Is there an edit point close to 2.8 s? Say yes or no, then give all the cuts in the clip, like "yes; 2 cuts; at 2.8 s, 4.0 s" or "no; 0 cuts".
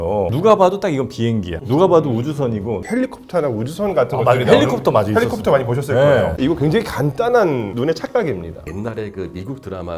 yes; 2 cuts; at 2.8 s, 8.6 s